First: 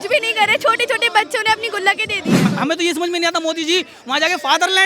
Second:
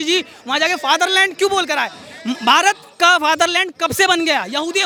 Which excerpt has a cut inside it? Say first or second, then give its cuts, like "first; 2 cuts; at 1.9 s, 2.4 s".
first; 1 cut; at 2.5 s